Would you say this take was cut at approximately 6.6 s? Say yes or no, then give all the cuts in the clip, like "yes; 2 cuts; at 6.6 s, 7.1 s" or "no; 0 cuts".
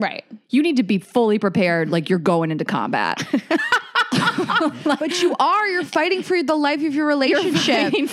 no; 0 cuts